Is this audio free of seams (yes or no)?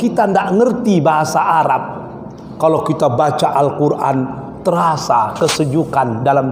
yes